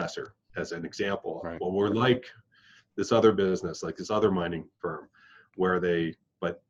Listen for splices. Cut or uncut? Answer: uncut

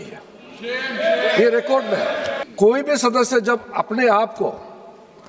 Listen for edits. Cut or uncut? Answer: cut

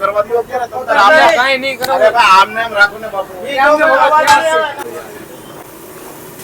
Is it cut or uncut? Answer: cut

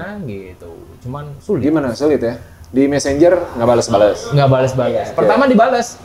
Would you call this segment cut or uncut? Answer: uncut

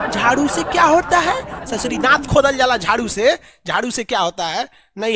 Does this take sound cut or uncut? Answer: uncut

